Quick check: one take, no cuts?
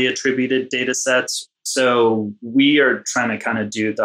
no; 2 cuts; at 1.3 s, 2.4 s

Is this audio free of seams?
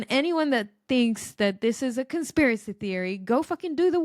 yes; 0 cuts

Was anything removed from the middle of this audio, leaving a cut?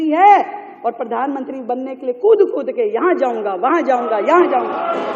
no; 0 cuts

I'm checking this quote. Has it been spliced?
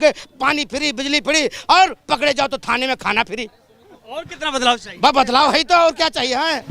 no; 0 cuts

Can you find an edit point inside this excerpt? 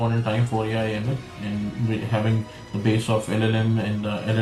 no; 0 cuts

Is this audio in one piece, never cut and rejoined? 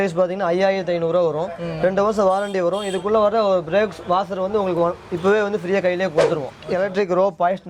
no; 1 cut; at 6.5 s

